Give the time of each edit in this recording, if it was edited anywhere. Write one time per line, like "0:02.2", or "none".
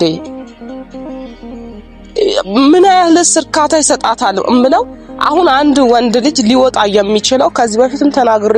none